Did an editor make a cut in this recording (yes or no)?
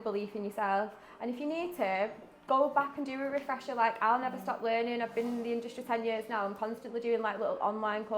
no